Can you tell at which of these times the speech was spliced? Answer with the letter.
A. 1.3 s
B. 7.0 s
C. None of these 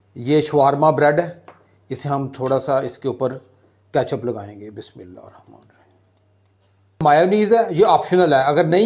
B